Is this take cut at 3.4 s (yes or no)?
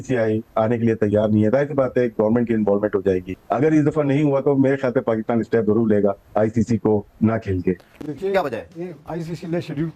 yes